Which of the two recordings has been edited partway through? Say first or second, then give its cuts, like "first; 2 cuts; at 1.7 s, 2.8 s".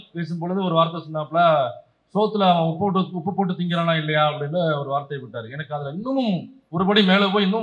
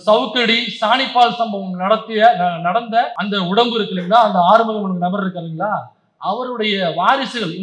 second; 1 cut; at 3.2 s